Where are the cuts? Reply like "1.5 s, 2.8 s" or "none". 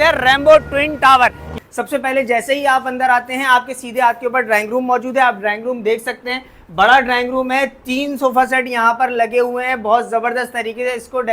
1.4 s